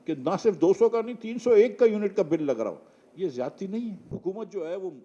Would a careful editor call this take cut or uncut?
cut